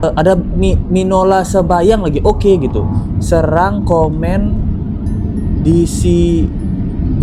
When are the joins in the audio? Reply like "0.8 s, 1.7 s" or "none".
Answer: none